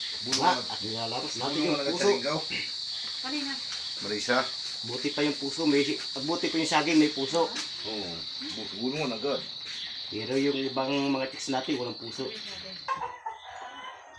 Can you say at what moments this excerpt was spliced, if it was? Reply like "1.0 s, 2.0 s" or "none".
12.9 s